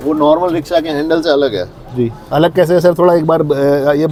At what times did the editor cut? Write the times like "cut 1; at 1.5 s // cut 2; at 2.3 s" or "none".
none

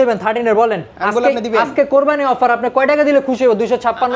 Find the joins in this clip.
none

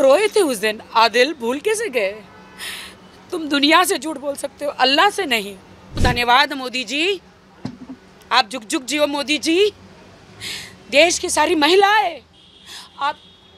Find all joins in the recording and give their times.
cut 1; at 6.0 s

